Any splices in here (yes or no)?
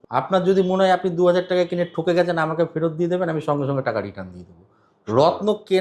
no